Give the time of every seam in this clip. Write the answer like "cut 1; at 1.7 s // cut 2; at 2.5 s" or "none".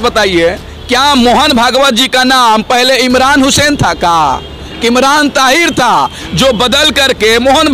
none